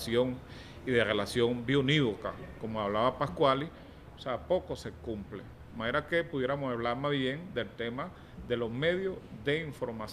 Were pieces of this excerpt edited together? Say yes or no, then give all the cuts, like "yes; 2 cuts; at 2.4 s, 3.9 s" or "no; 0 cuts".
yes; 1 cut; at 2.9 s